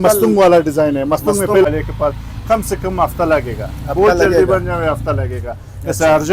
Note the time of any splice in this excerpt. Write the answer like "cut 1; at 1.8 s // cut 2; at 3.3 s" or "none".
cut 1; at 1.6 s